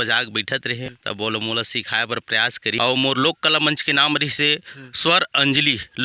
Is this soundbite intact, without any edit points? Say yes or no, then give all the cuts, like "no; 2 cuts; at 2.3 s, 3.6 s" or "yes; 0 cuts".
no; 2 cuts; at 1.0 s, 2.8 s